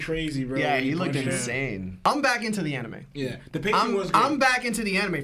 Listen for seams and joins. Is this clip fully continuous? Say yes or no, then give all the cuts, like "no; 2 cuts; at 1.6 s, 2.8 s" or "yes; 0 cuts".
no; 1 cut; at 1.9 s